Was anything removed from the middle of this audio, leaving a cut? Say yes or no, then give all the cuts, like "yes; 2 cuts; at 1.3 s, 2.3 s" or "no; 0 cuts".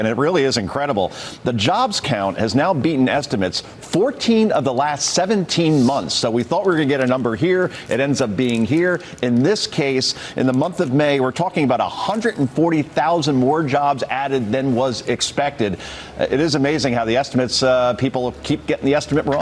no; 0 cuts